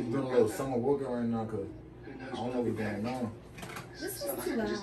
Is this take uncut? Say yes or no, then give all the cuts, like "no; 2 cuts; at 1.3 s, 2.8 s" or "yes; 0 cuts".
yes; 0 cuts